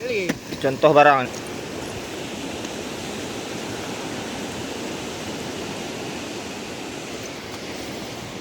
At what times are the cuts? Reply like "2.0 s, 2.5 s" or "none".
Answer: 1.3 s